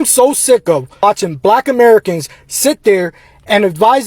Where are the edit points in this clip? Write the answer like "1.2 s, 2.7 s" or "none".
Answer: 1.0 s

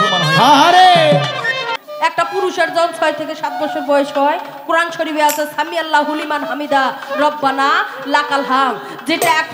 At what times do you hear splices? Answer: 1.7 s

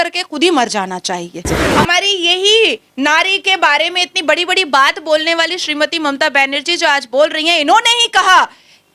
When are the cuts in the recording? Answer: 1.6 s

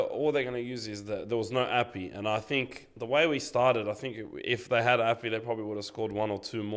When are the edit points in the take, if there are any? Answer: none

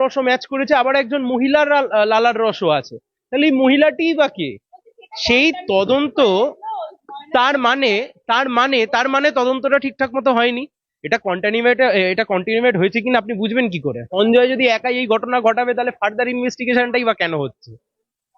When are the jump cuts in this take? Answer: 14.0 s

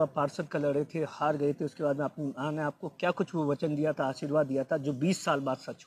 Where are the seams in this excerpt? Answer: none

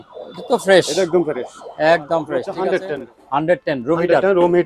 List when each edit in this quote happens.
2.5 s

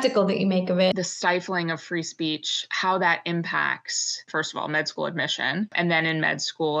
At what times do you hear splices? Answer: 0.9 s, 4.3 s, 5.7 s

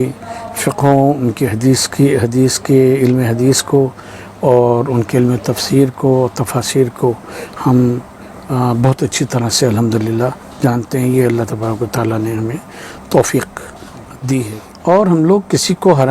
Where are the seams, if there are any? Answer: 14.6 s

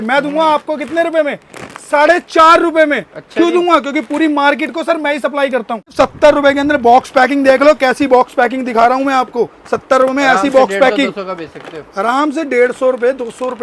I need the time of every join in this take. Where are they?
5.9 s

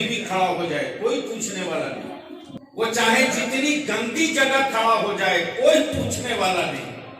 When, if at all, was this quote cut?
2.5 s

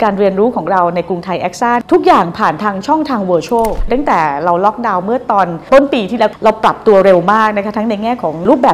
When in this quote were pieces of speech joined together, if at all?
1.8 s, 3.9 s

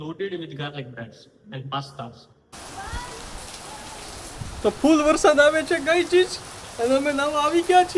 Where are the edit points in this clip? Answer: 2.2 s

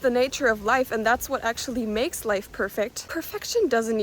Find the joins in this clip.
3.1 s

